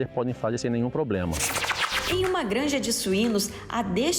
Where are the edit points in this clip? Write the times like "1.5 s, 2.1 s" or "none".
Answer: 1.9 s